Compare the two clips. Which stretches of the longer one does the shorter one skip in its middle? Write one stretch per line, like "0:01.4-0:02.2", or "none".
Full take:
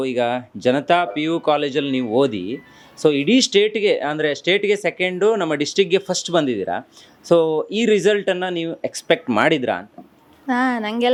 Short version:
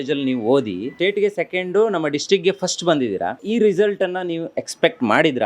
0:02.6-0:04.4
0:06.9-0:07.7